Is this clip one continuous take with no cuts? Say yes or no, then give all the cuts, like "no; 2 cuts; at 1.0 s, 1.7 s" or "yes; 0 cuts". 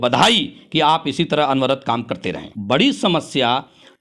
no; 1 cut; at 2.5 s